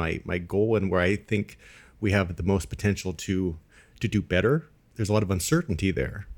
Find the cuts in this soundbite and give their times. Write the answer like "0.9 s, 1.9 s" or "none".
4.8 s

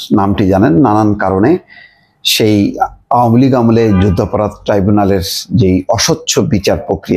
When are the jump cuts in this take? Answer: none

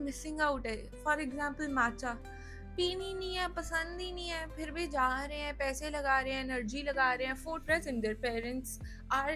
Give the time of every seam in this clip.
7.6 s

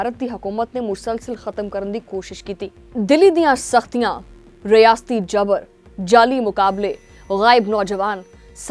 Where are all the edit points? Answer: none

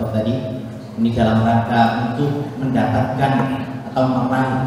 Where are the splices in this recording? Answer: none

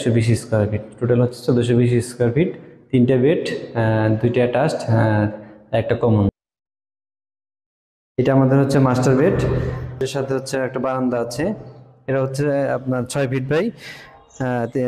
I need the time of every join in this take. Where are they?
6.3 s, 10.0 s

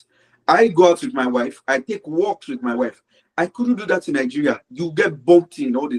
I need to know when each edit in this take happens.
none

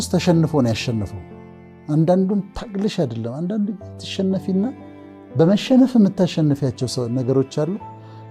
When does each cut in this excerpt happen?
none

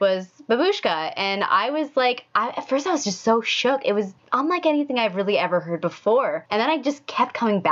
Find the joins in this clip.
4.2 s, 6.4 s

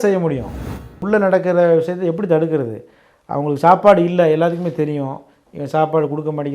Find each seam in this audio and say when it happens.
1.0 s

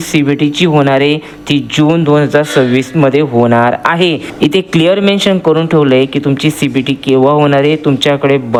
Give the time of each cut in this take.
none

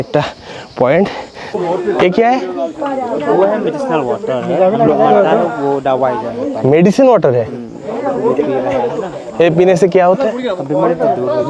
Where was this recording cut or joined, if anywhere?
1.6 s

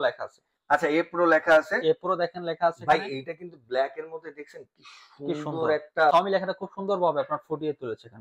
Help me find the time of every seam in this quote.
6.1 s

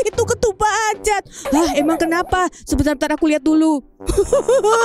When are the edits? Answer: 4.0 s

